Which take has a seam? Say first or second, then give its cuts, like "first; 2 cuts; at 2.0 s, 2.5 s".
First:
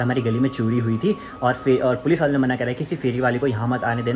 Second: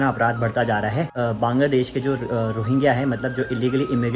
second; 1 cut; at 1.1 s